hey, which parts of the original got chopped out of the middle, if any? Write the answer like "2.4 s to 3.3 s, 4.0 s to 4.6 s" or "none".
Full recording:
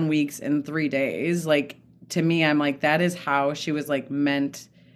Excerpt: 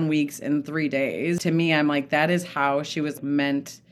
1.4 s to 2.1 s, 3.9 s to 4.0 s

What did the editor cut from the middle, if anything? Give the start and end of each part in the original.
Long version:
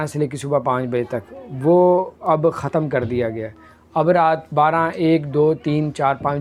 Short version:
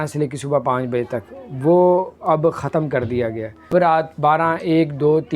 3.7 s to 4.0 s

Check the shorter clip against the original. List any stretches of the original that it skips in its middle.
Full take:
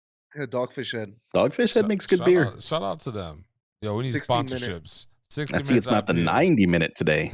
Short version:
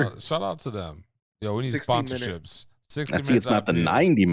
none

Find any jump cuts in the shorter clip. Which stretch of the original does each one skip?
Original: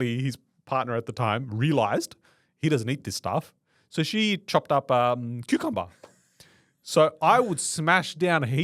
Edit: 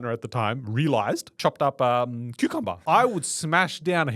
2.2 s to 4.4 s, 5.9 s to 7.2 s

